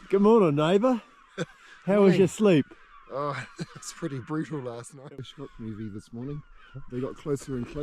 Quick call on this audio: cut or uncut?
cut